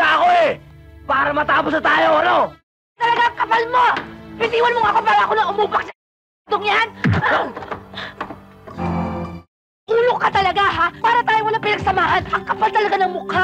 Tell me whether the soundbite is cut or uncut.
cut